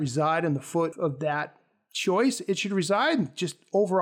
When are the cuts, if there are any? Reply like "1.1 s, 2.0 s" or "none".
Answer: 0.9 s